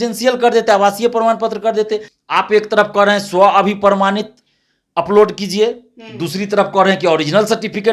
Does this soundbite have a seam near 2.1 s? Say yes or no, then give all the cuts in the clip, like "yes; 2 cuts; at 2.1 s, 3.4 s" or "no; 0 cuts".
yes; 1 cut; at 2.1 s